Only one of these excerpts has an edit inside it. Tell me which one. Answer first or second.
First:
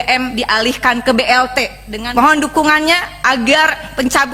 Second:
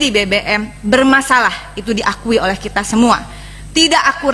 first